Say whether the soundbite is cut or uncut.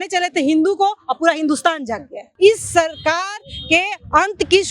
cut